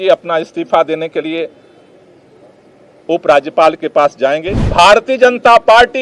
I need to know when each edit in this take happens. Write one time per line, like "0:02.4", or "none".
0:04.6